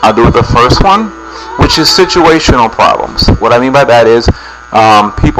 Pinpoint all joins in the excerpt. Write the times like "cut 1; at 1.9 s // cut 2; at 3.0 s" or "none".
cut 1; at 3.6 s